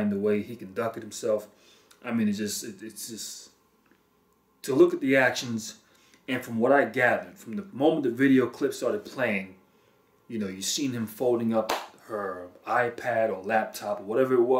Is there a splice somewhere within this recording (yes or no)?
yes